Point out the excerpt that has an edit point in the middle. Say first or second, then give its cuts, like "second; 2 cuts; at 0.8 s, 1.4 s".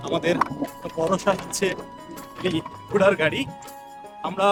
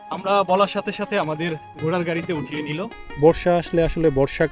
second; 1 cut; at 3.0 s